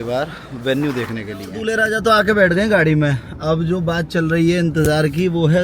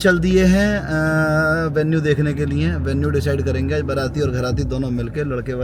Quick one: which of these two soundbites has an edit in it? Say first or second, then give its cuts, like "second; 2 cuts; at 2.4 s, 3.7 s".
first; 1 cut; at 1.4 s